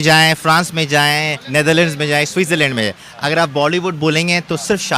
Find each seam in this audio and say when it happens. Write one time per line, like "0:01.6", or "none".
none